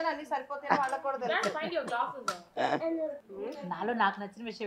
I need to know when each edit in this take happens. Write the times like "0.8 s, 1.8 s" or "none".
3.2 s